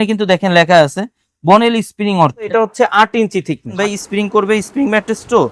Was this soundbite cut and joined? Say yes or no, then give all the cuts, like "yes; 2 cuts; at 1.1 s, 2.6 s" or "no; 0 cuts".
yes; 2 cuts; at 2.5 s, 3.8 s